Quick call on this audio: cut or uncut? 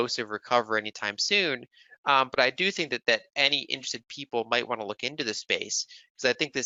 uncut